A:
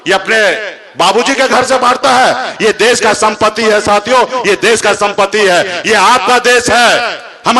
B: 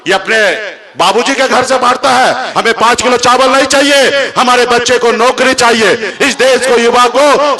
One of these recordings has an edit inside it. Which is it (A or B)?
B